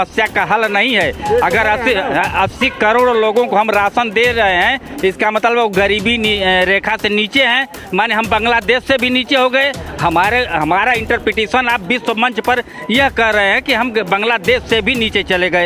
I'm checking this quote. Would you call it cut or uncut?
uncut